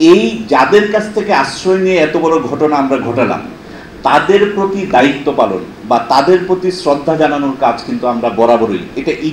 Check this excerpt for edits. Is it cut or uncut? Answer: uncut